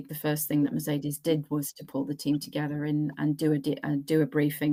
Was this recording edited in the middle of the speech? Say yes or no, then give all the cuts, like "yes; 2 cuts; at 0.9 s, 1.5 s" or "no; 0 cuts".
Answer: no; 0 cuts